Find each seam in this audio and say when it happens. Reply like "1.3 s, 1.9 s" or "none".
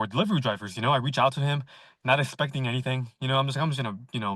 none